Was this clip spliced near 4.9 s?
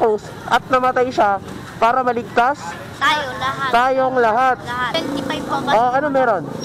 yes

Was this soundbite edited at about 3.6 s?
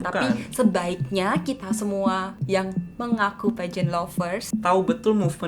no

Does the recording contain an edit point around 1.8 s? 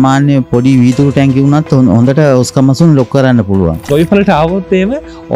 no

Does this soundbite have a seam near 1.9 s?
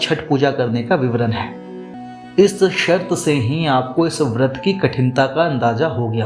yes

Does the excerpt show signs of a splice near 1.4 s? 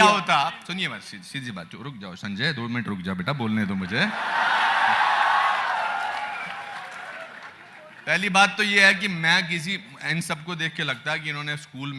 no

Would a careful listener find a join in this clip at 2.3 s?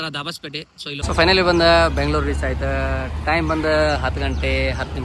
no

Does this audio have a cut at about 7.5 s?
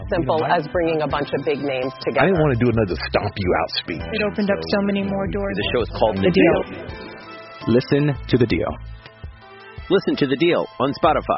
no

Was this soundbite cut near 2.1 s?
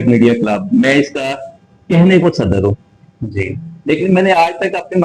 no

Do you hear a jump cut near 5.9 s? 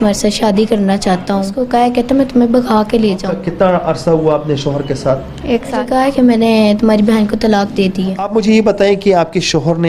yes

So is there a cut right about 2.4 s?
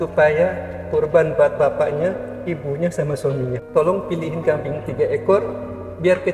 no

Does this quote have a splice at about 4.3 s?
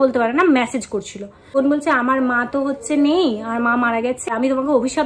yes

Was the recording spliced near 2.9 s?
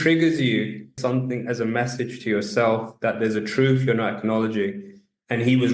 no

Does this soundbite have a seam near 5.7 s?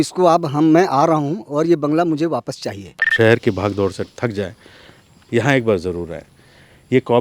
no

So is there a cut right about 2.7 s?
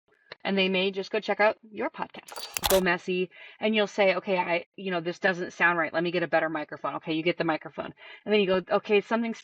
yes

